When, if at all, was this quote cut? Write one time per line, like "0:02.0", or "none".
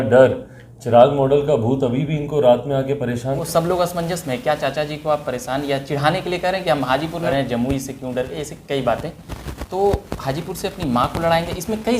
0:03.4
0:07.3